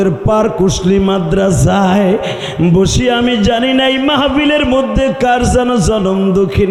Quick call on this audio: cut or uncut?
uncut